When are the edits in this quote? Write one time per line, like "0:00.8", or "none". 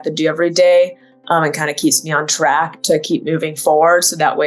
none